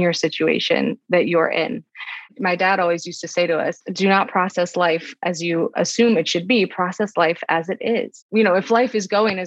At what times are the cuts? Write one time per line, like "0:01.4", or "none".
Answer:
0:05.7
0:08.2